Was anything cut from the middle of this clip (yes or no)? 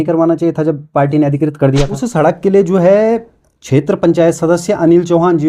yes